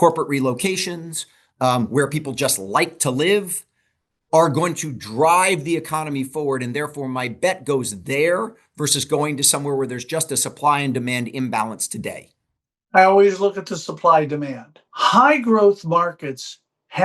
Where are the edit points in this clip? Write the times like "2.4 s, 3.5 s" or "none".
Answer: 14.8 s